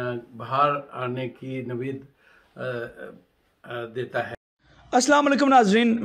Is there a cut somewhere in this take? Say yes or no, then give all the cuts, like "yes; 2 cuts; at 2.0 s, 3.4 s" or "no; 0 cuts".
yes; 1 cut; at 4.3 s